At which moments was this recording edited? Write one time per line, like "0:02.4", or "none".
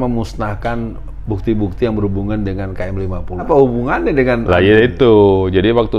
0:03.4